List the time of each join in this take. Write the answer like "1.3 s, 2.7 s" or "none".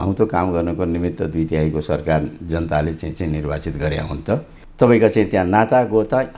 4.6 s